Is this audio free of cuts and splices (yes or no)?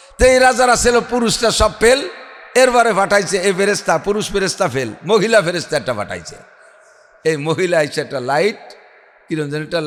yes